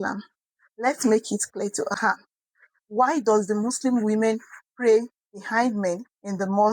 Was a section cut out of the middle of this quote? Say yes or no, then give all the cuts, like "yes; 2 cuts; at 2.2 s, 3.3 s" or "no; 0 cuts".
yes; 1 cut; at 1.9 s